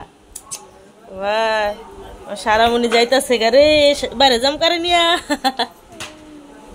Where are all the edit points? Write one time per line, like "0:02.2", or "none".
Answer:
none